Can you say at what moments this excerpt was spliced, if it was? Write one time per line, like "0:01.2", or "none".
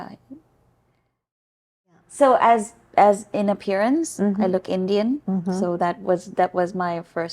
0:01.5